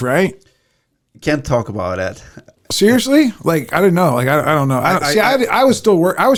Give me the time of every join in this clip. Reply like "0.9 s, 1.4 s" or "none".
none